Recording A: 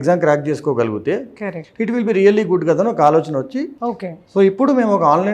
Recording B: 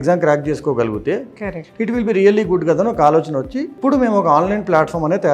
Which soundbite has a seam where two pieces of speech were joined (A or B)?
B